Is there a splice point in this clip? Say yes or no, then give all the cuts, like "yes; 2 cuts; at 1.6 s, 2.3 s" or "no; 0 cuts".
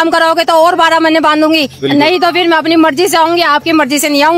no; 0 cuts